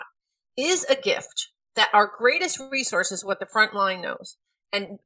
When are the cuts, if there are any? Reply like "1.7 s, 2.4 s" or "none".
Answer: 1.6 s